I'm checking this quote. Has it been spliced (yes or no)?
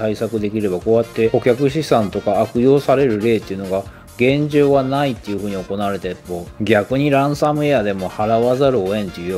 no